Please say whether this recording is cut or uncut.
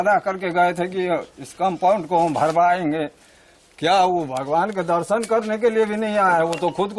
uncut